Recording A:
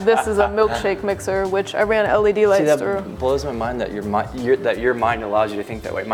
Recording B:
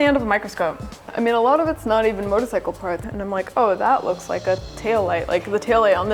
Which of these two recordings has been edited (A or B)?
B